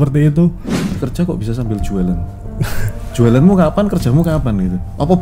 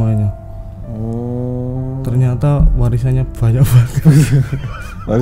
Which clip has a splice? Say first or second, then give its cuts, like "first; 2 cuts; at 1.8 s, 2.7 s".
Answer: first; 1 cut; at 0.9 s